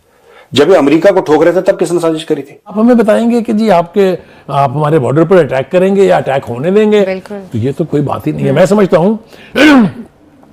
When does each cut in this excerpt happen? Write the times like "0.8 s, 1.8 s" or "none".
2.8 s